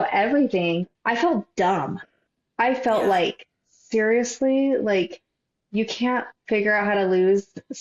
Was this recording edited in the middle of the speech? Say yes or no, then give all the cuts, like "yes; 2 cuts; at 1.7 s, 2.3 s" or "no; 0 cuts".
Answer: yes; 1 cut; at 0.9 s